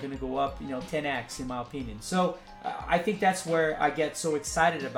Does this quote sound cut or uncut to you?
cut